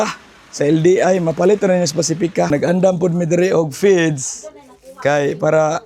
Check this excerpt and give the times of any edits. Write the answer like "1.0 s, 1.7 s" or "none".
2.5 s